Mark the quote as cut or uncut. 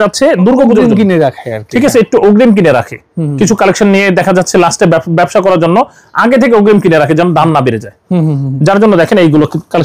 uncut